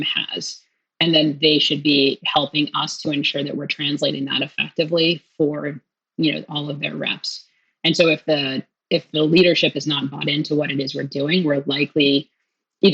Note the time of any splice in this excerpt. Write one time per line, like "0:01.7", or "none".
none